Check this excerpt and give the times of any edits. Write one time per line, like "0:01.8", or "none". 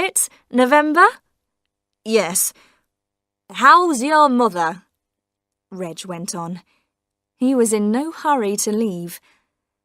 0:04.7

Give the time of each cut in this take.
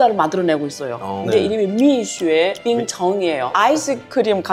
0:01.3
0:03.5

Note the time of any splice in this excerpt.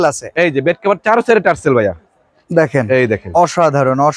none

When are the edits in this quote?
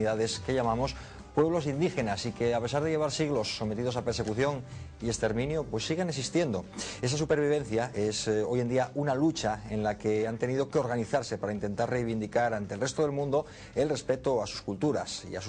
0:11.1

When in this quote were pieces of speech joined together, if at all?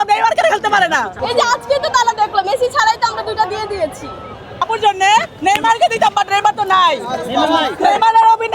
0:01.1
0:04.5

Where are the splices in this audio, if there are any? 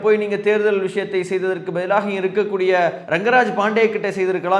0:03.0

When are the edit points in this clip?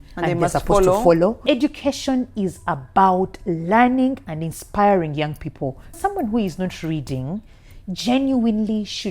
0:01.4
0:06.0

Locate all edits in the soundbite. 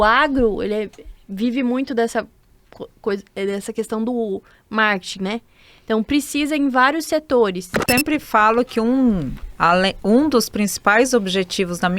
0:07.8

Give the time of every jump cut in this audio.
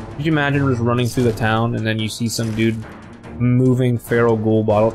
none

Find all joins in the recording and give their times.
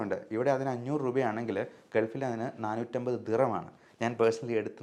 none

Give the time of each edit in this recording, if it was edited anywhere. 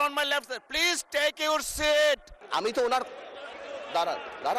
0:02.3

